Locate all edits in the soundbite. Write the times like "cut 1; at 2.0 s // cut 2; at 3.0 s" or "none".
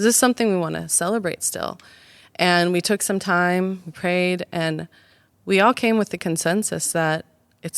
none